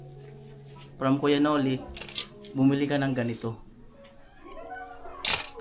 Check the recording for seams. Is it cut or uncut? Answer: uncut